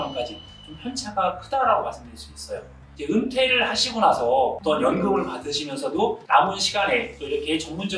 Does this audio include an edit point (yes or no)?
yes